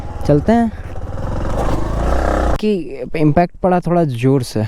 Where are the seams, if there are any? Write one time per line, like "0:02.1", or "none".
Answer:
0:01.1
0:02.6